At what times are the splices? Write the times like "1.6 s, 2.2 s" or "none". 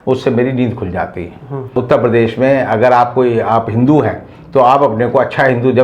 1.8 s